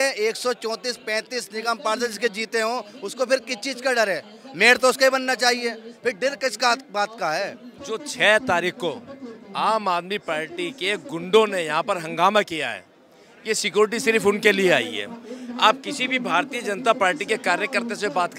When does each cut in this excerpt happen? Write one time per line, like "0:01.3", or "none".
0:07.7